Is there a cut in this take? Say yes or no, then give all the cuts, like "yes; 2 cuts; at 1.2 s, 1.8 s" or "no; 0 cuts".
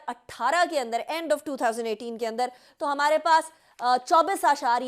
no; 0 cuts